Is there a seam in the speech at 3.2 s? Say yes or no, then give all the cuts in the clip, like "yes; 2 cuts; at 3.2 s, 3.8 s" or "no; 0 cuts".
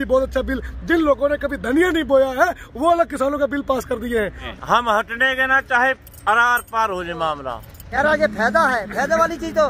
no; 2 cuts; at 4.5 s, 7.8 s